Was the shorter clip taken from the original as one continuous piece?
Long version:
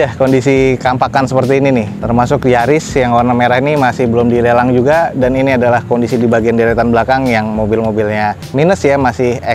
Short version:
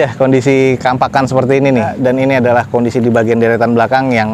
no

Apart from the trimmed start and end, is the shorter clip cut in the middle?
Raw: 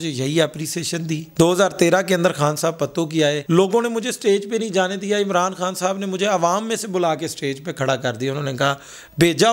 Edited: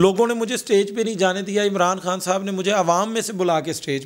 no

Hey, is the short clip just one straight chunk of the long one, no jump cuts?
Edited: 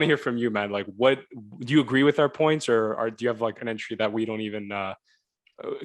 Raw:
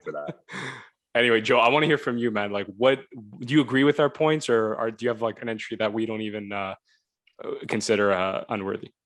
yes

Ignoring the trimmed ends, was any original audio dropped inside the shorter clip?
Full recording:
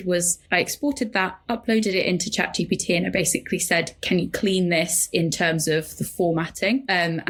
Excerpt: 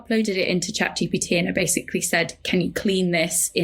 no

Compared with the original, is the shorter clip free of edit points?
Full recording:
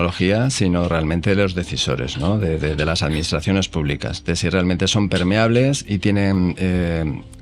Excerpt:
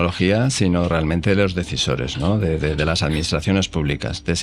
yes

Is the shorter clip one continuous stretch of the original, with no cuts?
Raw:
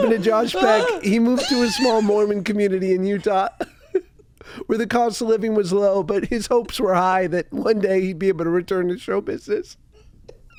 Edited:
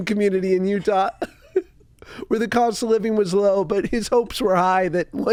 yes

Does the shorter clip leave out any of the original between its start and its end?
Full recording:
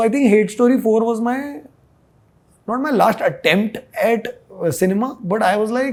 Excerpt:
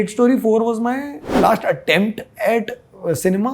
yes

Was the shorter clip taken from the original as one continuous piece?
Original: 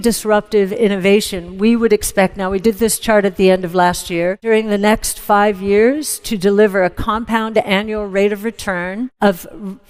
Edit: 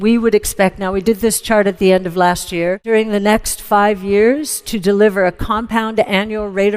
yes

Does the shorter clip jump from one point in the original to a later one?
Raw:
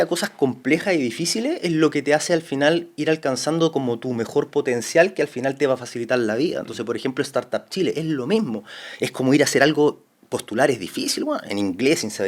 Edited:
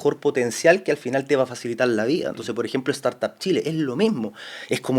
no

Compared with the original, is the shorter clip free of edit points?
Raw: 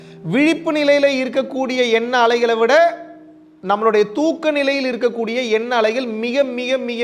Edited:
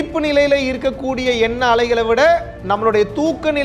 no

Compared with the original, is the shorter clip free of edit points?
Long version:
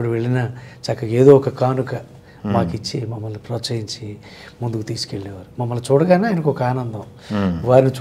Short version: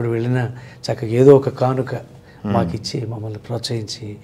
yes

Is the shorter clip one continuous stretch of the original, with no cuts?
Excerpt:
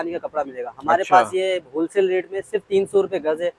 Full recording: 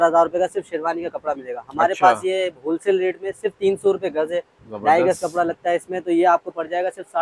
yes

